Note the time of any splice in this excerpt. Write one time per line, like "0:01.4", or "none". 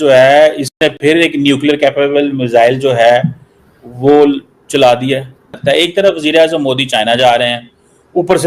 0:05.6